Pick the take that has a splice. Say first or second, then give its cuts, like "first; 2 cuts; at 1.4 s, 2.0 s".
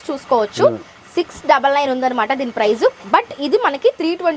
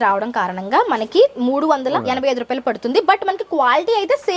second; 1 cut; at 2.0 s